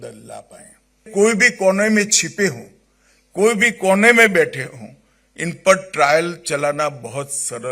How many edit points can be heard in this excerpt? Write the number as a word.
one